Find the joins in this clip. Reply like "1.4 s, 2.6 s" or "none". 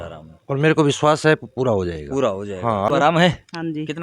2.9 s